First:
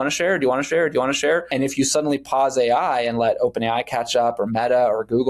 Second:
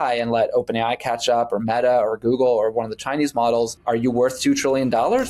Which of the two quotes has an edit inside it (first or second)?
first